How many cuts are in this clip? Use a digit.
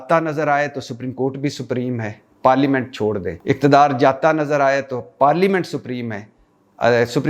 1